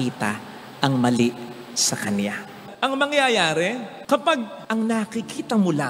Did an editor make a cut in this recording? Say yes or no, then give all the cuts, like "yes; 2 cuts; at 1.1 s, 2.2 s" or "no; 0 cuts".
yes; 1 cut; at 2.6 s